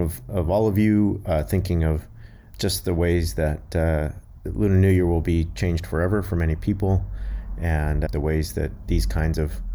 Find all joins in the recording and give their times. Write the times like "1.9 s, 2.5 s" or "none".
2.4 s, 8.1 s

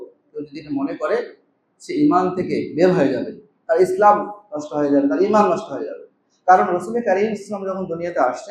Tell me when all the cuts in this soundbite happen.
none

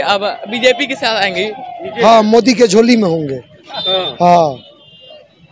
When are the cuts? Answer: 1.9 s

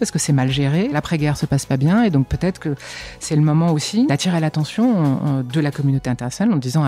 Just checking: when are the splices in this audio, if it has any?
0.9 s, 4.1 s

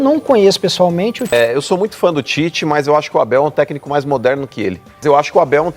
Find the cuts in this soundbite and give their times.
1.3 s, 5.0 s

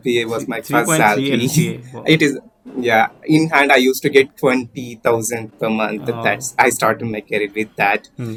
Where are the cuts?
none

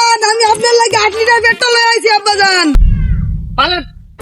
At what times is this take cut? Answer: 2.8 s

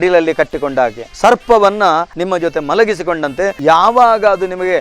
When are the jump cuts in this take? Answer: 1.1 s, 2.1 s

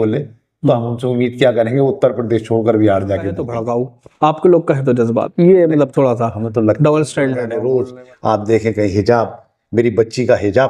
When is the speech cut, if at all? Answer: 3.5 s, 7.5 s

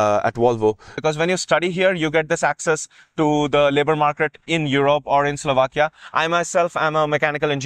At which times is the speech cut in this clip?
1.0 s

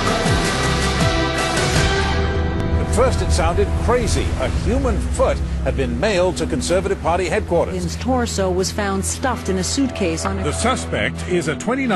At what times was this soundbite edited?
none

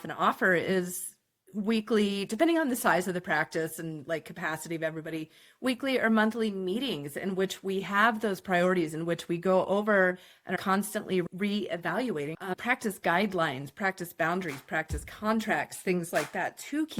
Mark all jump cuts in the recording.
11.2 s, 12.4 s

